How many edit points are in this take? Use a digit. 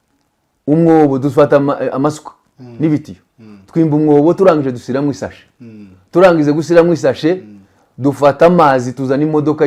0